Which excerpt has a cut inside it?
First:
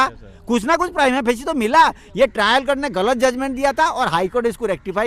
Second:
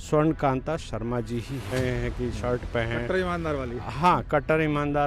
second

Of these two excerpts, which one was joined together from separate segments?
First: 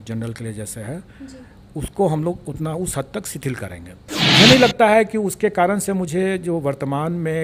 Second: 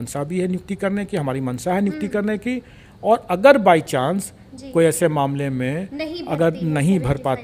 first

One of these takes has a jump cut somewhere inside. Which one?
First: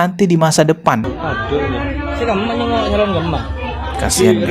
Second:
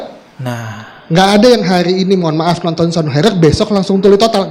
first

